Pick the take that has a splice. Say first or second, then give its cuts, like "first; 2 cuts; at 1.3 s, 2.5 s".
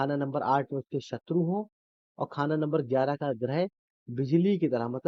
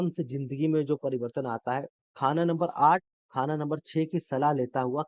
second; 1 cut; at 2.0 s